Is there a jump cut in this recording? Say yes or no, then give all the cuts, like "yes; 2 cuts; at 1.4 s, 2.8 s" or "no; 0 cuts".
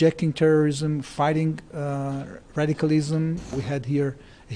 yes; 1 cut; at 3.6 s